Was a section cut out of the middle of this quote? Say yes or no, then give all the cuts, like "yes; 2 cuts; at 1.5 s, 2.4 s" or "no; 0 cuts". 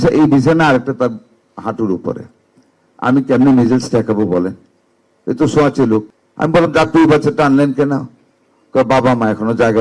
yes; 1 cut; at 6.2 s